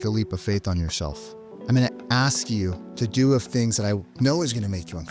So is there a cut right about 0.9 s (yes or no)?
no